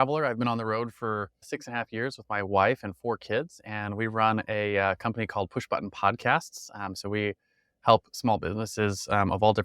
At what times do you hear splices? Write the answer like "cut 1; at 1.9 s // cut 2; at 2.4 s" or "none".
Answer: cut 1; at 1.5 s